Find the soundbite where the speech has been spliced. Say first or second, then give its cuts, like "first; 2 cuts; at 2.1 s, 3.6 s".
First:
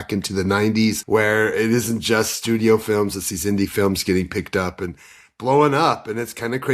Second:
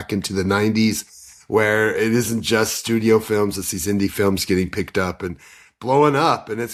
first; 1 cut; at 1.0 s